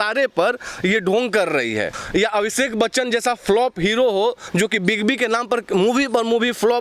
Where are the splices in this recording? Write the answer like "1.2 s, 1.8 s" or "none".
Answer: 2.0 s